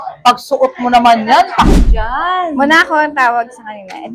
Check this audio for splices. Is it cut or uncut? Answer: cut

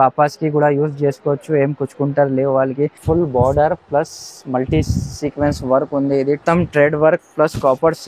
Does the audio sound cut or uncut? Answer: cut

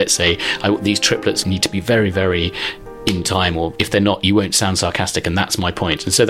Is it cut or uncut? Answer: cut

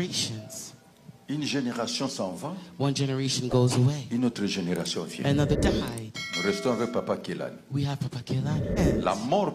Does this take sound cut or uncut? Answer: cut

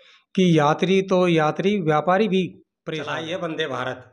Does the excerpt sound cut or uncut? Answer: cut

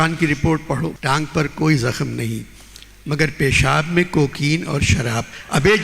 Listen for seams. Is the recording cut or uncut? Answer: cut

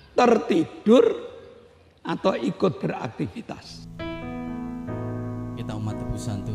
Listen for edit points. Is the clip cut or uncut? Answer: cut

